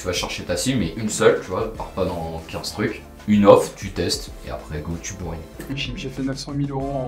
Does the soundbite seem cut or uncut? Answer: cut